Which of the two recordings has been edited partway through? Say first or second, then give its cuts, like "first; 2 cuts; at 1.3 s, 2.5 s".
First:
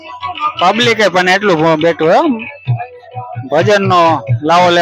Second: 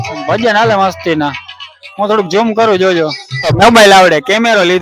second; 1 cut; at 3.3 s